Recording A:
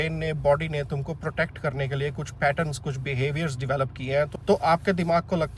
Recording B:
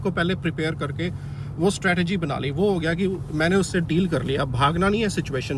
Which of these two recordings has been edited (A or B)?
A